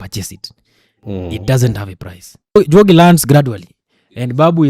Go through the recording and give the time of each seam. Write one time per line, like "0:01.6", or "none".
0:02.6